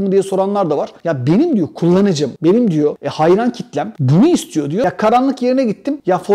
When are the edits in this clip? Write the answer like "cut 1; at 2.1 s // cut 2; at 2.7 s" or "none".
cut 1; at 0.9 s // cut 2; at 4.8 s